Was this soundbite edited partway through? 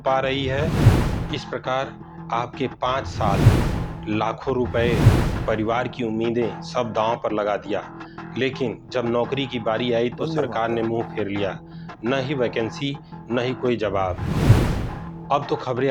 no; 0 cuts

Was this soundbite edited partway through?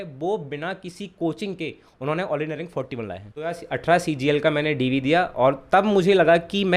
yes; 1 cut; at 3.6 s

